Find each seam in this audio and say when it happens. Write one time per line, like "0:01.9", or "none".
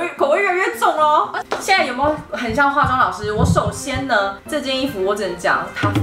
0:01.3